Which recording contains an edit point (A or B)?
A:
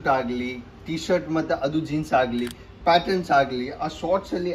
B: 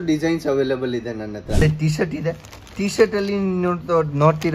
B